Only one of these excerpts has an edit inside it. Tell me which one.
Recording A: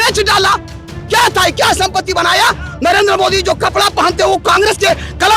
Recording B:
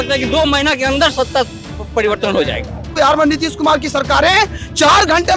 B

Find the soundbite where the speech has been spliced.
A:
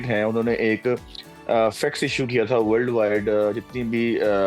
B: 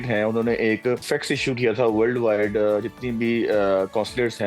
B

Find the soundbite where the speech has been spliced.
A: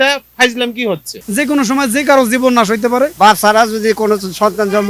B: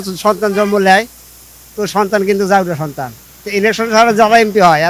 A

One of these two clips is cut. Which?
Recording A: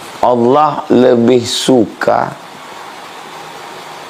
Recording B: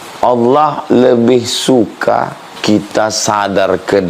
B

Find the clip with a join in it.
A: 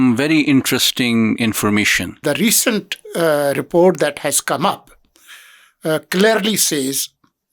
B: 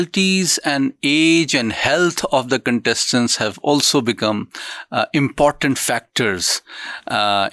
A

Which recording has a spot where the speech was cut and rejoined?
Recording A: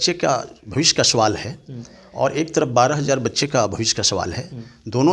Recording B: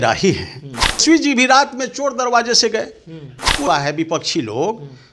B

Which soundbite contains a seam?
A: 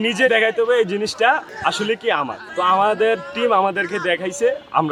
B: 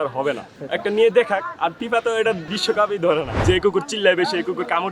B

